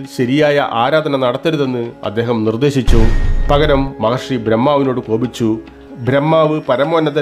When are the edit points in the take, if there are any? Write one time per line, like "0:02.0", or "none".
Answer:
0:03.3